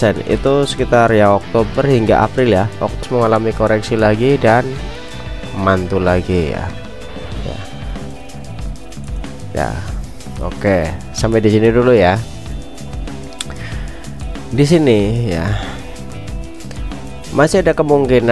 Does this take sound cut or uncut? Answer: cut